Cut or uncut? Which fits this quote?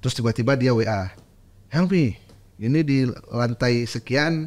uncut